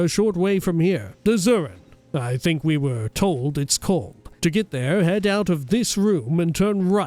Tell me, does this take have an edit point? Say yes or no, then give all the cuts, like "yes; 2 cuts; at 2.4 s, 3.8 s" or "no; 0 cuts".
yes; 2 cuts; at 1.1 s, 4.2 s